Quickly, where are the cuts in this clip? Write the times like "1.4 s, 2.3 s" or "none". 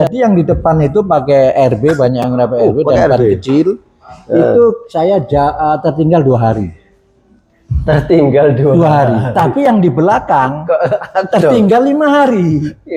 none